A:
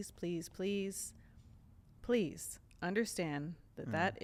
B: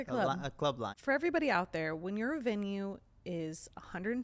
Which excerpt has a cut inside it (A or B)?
B